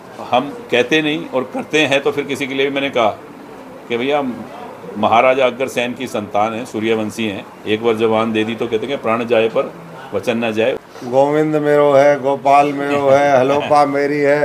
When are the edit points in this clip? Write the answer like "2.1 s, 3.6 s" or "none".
10.9 s